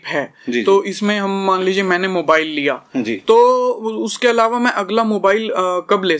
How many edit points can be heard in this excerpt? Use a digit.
0